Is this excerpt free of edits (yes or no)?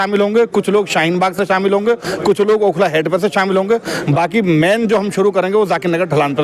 yes